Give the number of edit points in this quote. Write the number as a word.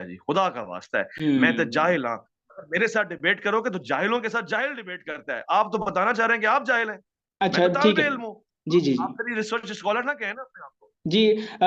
zero